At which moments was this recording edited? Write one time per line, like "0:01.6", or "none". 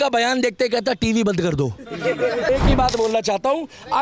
0:02.5